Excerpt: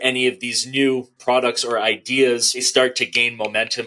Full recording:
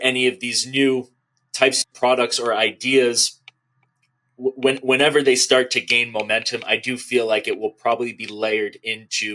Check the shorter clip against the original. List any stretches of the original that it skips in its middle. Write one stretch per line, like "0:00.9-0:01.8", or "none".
0:01.1-0:01.9
0:03.4-0:05.4